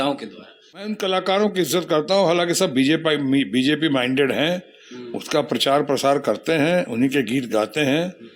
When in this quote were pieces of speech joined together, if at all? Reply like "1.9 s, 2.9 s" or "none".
0.9 s